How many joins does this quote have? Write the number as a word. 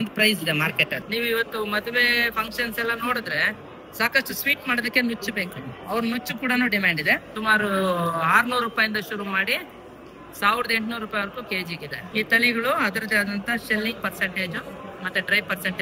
three